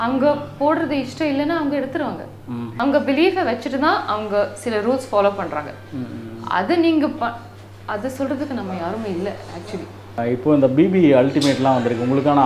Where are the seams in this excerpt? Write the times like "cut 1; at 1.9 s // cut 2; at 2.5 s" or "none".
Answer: cut 1; at 2.6 s

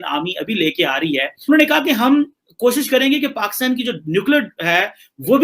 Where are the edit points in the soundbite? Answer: cut 1; at 1.4 s

